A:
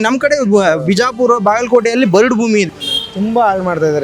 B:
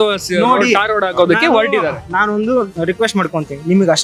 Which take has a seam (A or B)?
A